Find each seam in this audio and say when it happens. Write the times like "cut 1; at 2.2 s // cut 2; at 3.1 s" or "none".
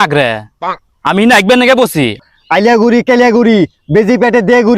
cut 1; at 2.2 s